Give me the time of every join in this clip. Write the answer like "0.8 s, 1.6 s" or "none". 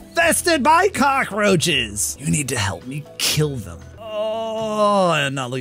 2.2 s, 4.0 s

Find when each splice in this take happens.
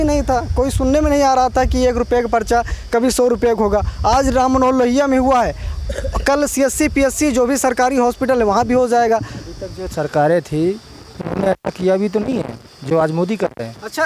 none

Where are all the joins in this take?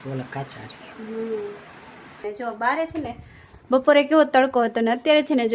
2.2 s

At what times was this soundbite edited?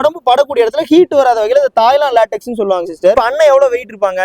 3.2 s

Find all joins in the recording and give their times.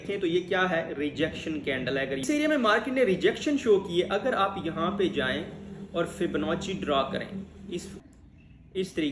2.2 s, 8.0 s

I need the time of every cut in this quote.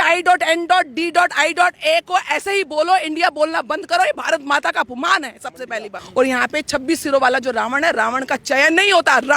6.0 s

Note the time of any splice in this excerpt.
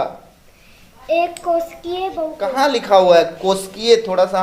2.5 s

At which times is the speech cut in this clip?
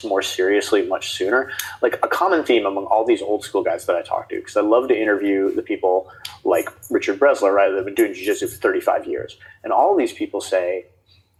none

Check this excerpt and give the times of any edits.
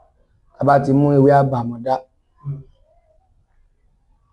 none

